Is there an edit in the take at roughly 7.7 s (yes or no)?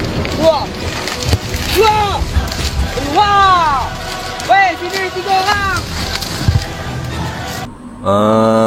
yes